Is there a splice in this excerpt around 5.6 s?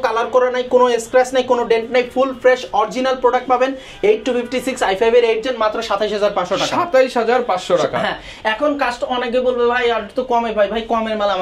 no; 0 cuts

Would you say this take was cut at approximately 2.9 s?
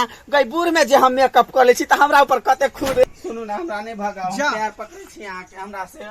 yes; 1 cut; at 2.9 s

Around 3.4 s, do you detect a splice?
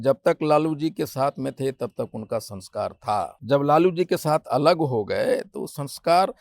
yes; 1 cut; at 3.4 s

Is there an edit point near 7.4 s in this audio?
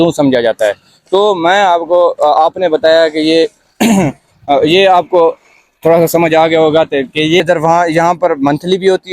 yes; 1 cut; at 7.4 s

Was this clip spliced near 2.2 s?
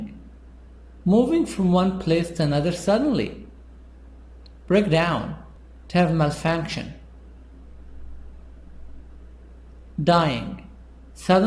yes; 1 cut; at 2.2 s

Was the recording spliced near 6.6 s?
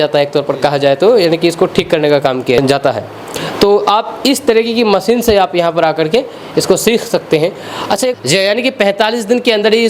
no; 2 cuts; at 2.6 s, 8.1 s

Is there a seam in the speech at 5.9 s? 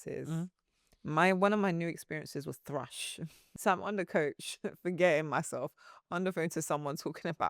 no; 1 cut; at 3.4 s

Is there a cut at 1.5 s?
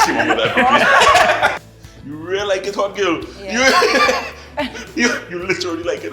yes; 1 cut; at 1.5 s

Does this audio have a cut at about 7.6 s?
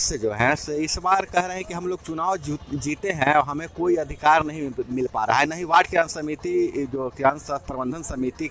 no; 0 cuts

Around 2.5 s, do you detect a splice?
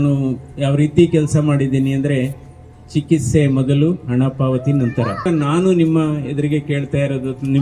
no; 1 cut; at 5.2 s

